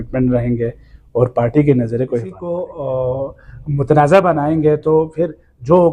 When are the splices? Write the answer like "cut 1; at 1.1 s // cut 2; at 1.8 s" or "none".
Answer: cut 1; at 2.3 s